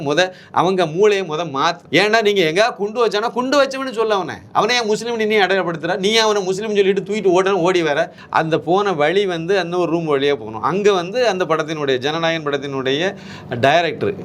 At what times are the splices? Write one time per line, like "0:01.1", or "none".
0:01.8
0:08.2